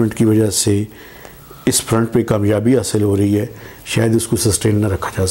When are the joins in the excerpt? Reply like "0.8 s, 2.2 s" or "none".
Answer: none